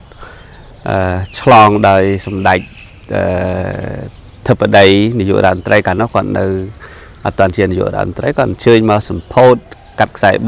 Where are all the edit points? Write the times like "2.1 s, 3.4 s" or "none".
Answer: none